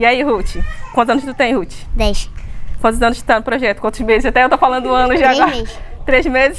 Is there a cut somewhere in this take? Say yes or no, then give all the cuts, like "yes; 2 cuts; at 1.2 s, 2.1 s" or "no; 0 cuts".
no; 0 cuts